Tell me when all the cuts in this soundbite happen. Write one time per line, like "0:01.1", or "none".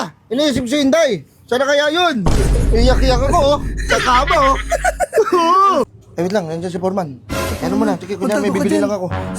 0:06.0